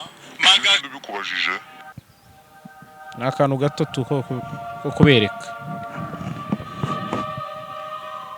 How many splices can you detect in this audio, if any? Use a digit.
1